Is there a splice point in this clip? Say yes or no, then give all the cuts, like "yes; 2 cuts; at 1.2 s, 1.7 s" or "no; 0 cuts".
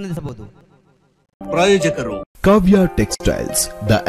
yes; 1 cut; at 1.5 s